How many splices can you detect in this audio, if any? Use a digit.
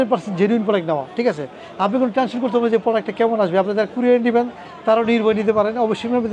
0